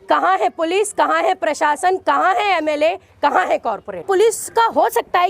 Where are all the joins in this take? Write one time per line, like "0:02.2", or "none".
0:04.0